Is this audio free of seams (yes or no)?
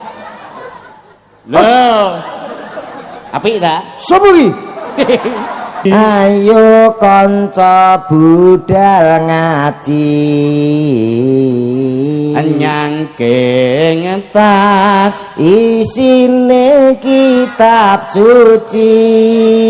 no